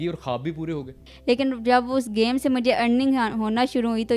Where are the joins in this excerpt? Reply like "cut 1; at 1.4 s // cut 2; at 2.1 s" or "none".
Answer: cut 1; at 1.1 s